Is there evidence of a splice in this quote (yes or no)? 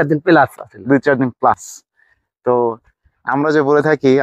no